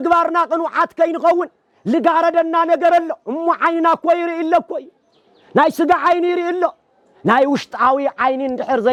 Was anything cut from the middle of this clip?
no; 0 cuts

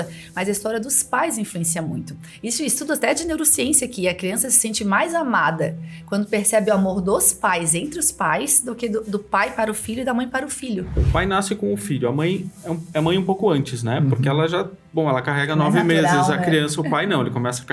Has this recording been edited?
yes; 1 cut; at 11.0 s

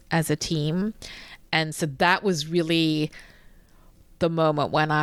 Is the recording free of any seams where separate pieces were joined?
yes; 0 cuts

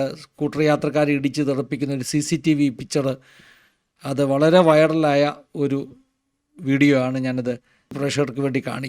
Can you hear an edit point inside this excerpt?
yes; 1 cut; at 8.0 s

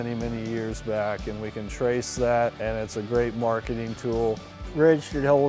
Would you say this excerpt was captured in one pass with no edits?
no; 2 cuts; at 2.6 s, 4.4 s

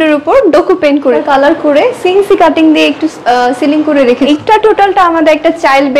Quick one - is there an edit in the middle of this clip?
yes; 2 cuts; at 1.2 s, 4.3 s

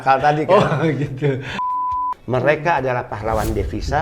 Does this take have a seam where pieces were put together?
yes; 1 cut; at 1.6 s

